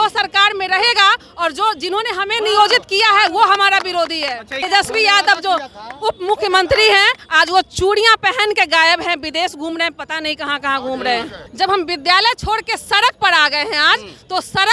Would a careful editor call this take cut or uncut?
cut